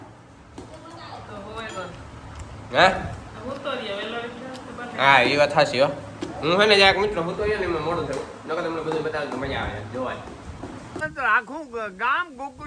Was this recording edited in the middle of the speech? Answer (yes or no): yes